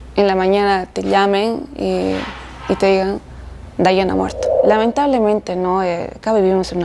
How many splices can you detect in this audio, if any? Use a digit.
1